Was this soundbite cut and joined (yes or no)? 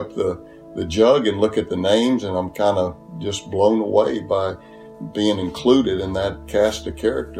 no